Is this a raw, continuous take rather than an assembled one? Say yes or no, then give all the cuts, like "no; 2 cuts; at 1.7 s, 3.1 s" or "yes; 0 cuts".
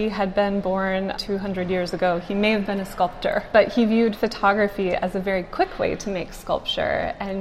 no; 2 cuts; at 1.1 s, 3.5 s